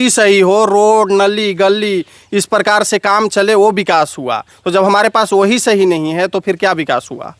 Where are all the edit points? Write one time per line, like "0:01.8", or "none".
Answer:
none